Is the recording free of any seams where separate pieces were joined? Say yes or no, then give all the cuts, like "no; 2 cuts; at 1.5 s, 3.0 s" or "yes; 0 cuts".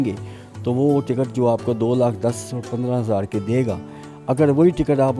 yes; 0 cuts